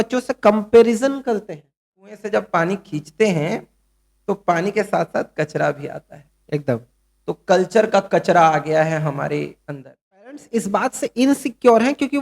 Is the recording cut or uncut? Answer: cut